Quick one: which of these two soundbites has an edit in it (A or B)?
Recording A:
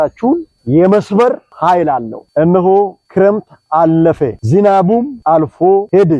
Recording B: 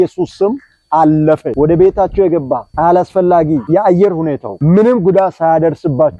A